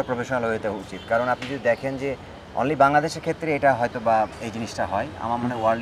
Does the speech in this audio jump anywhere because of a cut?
no; 0 cuts

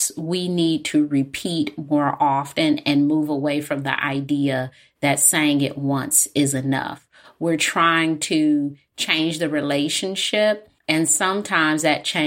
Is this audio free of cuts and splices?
no; 1 cut; at 10.7 s

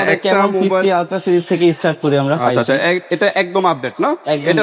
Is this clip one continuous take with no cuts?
yes; 0 cuts

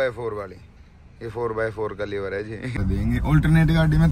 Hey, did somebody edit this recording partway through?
yes; 1 cut; at 2.7 s

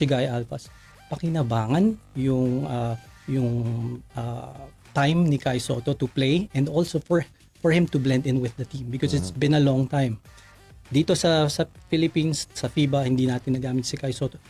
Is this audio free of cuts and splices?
yes; 0 cuts

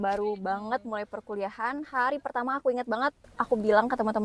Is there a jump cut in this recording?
no; 0 cuts

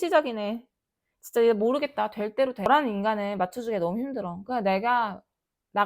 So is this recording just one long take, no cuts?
no; 1 cut; at 2.7 s

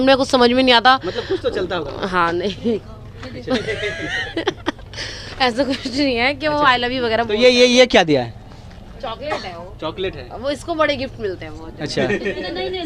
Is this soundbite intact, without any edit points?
yes; 0 cuts

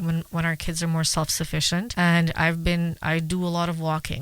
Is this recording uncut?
no; 1 cut; at 1.9 s

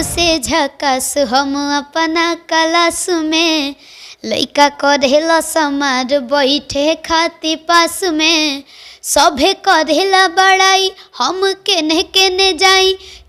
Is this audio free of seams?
yes; 0 cuts

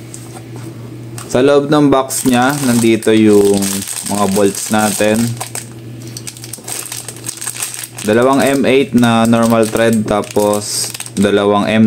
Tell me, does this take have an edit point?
no; 0 cuts

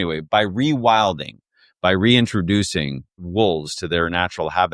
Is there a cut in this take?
yes; 1 cut; at 3.1 s

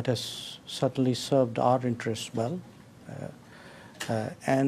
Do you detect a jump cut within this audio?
no; 0 cuts

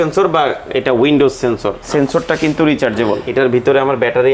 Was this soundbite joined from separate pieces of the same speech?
yes; 2 cuts; at 1.8 s, 3.2 s

